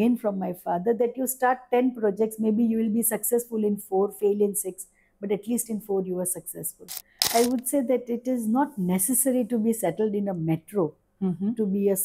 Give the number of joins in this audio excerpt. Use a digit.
1